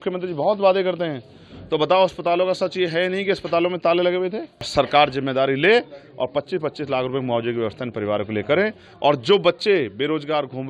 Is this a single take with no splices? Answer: no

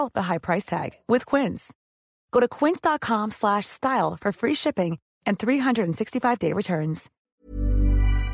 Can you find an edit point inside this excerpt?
yes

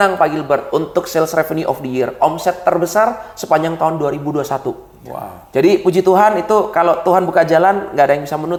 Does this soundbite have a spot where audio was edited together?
no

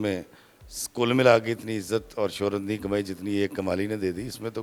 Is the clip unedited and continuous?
yes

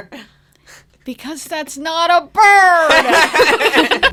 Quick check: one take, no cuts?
yes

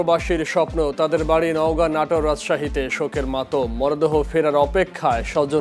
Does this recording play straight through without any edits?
yes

